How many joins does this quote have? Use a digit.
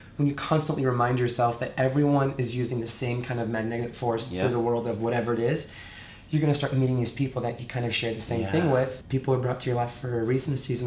1